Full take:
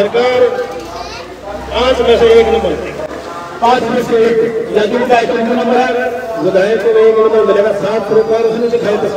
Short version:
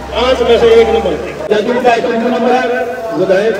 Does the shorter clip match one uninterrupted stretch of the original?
no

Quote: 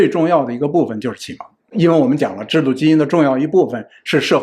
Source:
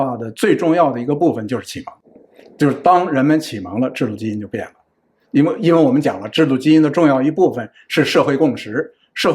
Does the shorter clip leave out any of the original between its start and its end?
yes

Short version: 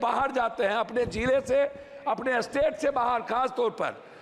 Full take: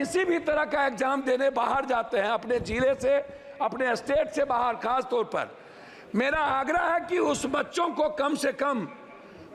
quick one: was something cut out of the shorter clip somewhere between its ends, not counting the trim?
no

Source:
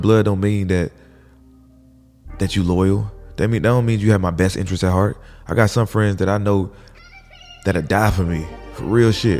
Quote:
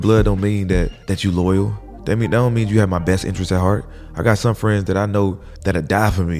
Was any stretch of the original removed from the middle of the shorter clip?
yes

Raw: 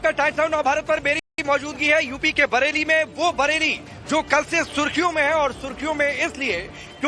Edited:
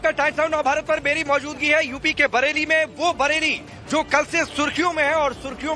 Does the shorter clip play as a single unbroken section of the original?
no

